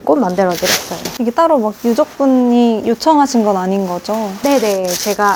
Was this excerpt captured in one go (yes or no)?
yes